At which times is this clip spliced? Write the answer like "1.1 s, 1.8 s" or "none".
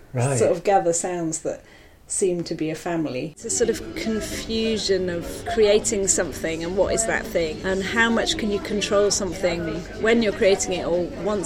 3.4 s, 5.4 s, 7.6 s, 10.0 s

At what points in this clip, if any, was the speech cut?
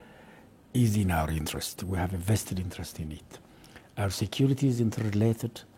none

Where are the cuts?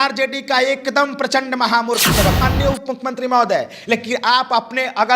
2.4 s

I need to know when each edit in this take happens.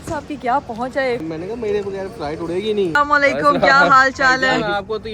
1.2 s, 3.0 s

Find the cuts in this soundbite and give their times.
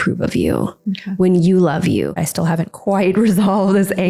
2.2 s

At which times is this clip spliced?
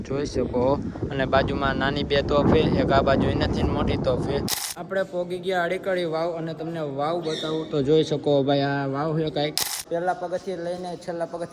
4.6 s, 9.7 s

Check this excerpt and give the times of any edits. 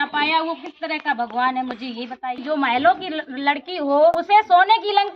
2.4 s, 4.1 s

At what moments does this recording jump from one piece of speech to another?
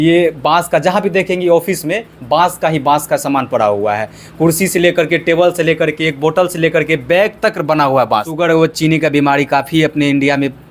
8.7 s

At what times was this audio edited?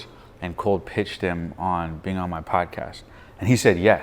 none

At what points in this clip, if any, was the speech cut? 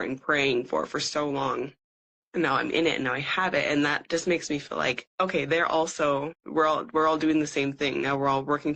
5.1 s, 6.4 s

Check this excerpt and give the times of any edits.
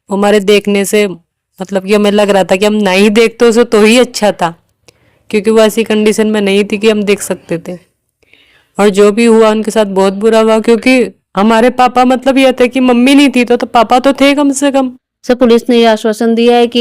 14.7 s

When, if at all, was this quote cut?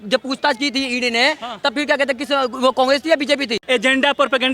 3.6 s

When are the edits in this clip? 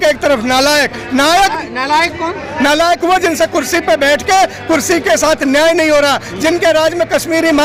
none

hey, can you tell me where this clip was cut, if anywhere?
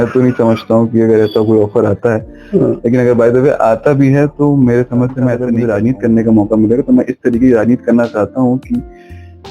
5.4 s

